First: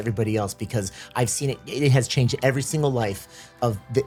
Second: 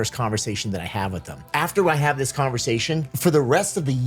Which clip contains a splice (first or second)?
second